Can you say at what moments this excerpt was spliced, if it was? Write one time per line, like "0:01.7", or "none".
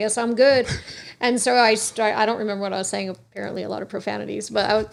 none